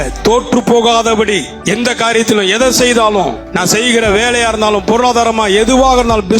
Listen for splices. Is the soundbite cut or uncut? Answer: cut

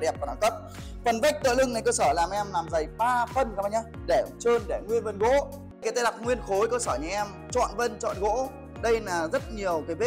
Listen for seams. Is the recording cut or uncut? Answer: cut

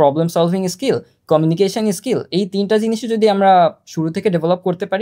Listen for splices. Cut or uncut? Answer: uncut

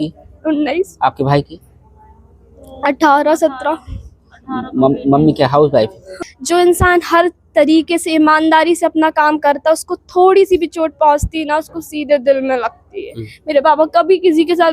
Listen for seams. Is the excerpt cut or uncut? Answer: cut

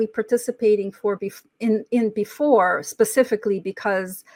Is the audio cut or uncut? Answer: uncut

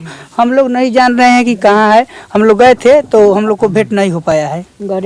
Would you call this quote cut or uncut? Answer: uncut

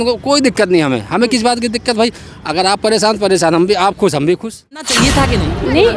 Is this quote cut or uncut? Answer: cut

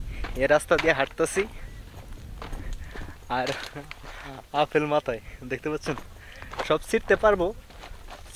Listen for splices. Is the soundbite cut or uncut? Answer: uncut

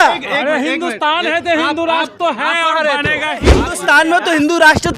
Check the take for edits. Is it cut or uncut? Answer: cut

